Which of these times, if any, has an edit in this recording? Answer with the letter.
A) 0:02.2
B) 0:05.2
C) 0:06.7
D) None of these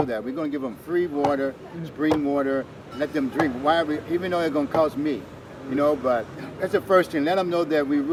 D